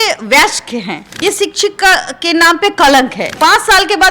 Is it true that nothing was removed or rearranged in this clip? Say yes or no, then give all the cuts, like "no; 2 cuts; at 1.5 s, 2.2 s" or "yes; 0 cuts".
no; 2 cuts; at 1.0 s, 3.3 s